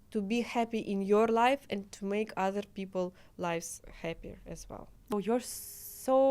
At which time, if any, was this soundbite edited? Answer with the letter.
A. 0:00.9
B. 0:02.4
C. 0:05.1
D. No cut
C